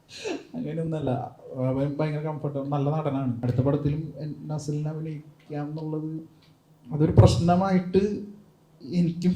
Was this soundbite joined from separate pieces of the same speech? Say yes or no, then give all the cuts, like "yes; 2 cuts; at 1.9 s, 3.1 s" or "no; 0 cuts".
yes; 1 cut; at 3.4 s